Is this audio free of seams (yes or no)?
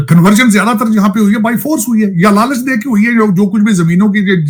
yes